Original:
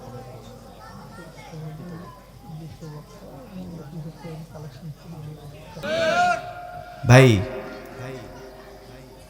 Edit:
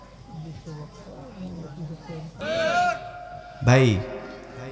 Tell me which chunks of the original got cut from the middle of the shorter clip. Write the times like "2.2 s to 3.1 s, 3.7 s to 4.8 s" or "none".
4.5 s to 5.8 s